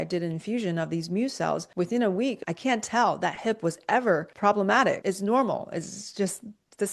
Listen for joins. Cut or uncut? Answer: cut